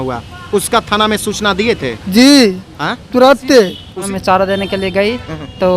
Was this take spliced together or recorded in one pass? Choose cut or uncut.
cut